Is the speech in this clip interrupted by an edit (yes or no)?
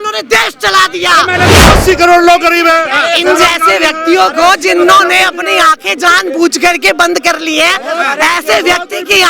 yes